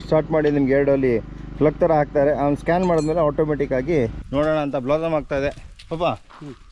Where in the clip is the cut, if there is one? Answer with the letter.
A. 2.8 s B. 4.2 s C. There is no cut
B